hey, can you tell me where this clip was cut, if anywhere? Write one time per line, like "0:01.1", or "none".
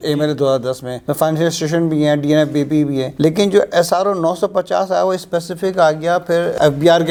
none